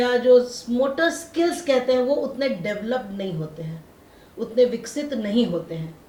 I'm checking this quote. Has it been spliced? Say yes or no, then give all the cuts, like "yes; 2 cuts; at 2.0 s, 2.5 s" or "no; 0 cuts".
no; 0 cuts